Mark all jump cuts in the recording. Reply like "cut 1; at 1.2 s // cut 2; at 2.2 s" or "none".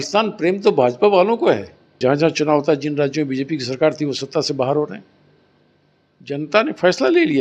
cut 1; at 2.0 s